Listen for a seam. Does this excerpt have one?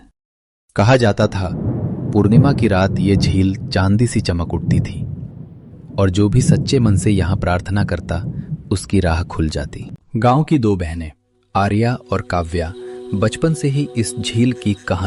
no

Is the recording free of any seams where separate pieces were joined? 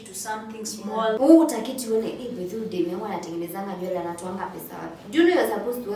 no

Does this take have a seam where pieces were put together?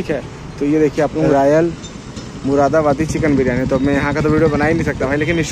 yes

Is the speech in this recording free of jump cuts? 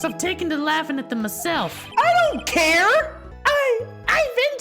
no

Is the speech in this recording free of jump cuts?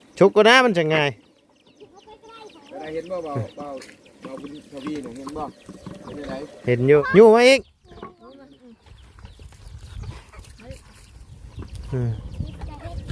no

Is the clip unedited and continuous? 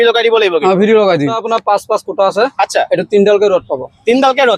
no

